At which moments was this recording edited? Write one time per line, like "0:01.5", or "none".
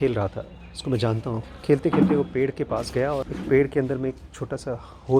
0:01.4
0:03.3